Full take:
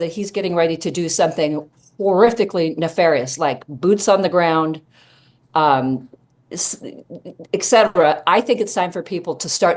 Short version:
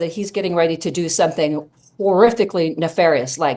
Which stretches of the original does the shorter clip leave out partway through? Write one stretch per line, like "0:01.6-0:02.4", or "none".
none